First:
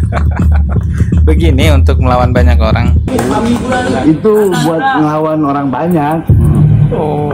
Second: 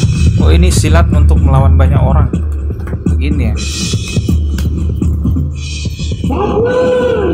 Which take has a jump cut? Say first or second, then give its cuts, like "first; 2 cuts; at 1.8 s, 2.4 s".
first; 1 cut; at 3.0 s